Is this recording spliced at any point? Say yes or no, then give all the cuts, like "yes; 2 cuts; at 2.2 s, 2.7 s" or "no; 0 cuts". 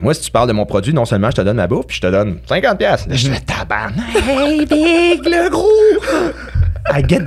no; 0 cuts